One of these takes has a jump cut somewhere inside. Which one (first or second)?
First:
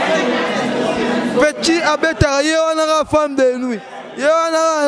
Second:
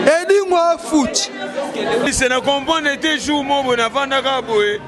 second